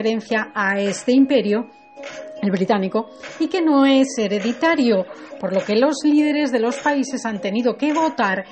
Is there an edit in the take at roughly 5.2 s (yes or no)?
no